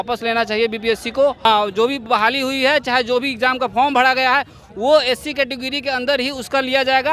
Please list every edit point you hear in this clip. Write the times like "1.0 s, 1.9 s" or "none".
1.4 s